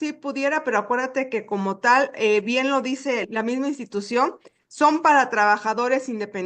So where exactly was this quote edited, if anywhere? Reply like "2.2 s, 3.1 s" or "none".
3.2 s